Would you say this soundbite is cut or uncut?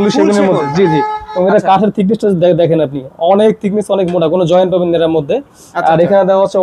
uncut